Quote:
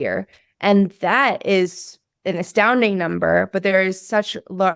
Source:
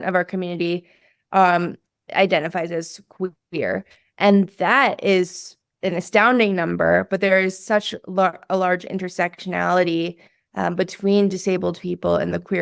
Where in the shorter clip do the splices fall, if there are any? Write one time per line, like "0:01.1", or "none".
none